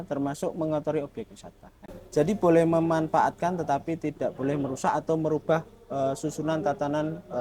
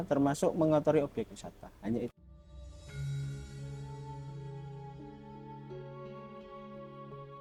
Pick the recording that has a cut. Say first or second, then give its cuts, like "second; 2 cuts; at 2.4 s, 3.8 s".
first; 1 cut; at 1.9 s